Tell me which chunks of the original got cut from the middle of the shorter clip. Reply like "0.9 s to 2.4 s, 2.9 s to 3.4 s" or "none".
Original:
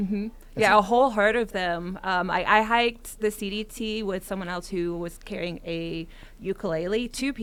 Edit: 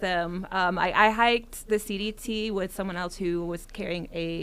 none